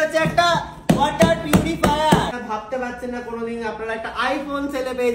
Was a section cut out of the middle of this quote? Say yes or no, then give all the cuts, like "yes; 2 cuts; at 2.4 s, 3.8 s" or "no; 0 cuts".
yes; 1 cut; at 2.3 s